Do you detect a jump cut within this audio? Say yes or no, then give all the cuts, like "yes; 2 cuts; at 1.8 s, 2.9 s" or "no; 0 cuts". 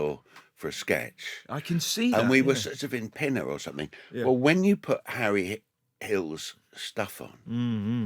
no; 0 cuts